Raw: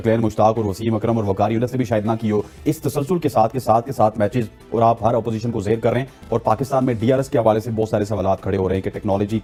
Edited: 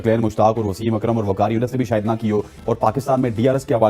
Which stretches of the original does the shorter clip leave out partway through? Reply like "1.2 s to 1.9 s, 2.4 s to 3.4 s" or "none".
2.5 s to 6.2 s